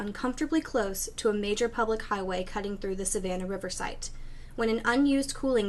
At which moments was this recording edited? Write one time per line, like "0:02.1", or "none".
0:04.7